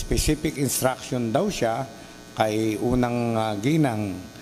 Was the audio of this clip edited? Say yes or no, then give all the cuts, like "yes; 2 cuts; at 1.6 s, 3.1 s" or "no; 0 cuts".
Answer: no; 0 cuts